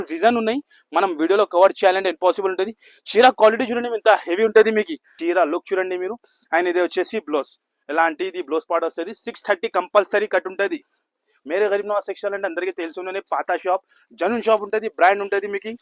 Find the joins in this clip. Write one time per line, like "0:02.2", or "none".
0:05.0